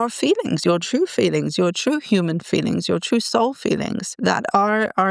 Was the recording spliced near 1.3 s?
no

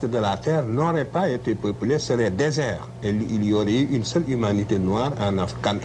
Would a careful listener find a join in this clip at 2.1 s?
no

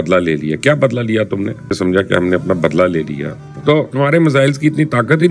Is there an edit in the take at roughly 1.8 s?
yes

